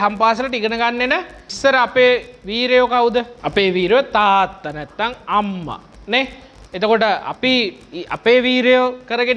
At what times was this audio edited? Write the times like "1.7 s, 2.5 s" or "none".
1.4 s, 3.4 s